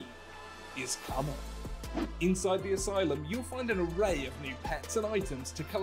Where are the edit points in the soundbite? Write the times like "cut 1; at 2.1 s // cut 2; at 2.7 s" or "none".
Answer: cut 1; at 3.9 s